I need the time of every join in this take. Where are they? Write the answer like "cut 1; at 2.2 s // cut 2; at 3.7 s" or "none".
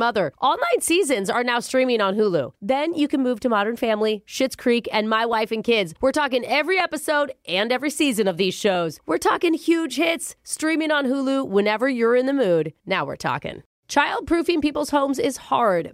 cut 1; at 13.7 s

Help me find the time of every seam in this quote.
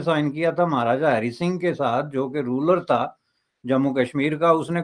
none

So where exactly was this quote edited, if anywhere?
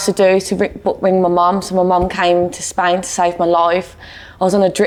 none

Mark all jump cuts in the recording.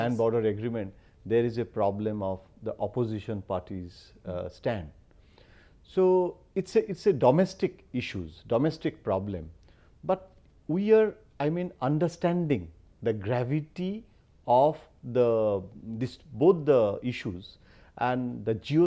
cut 1; at 12.2 s

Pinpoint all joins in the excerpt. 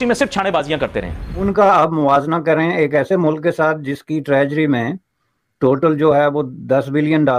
cut 1; at 1.4 s

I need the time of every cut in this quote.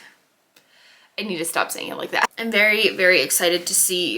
cut 1; at 2.3 s

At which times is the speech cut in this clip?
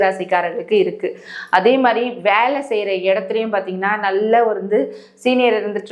none

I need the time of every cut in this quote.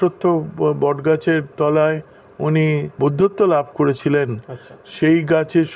cut 1; at 2.9 s

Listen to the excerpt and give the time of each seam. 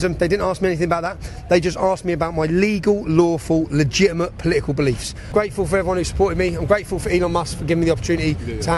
cut 1; at 5.3 s

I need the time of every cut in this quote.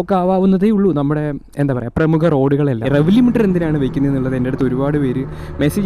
cut 1; at 2.8 s

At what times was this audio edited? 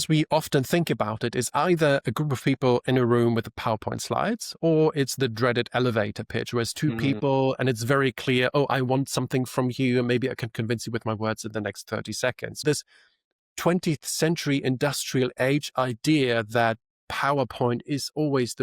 cut 1; at 12.6 s

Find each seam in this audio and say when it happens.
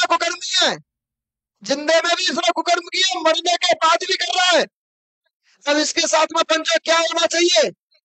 none

